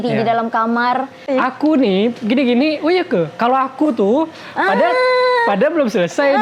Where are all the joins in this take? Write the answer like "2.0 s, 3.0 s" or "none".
1.2 s